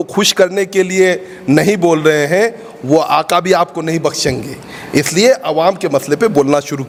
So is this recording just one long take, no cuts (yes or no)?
yes